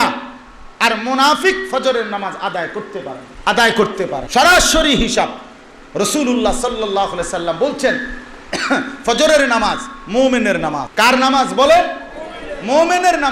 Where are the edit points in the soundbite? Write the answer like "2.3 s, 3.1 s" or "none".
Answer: 3.2 s, 4.2 s, 10.9 s